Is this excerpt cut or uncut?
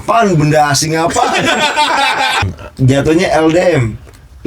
cut